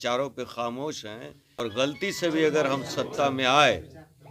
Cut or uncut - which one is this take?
cut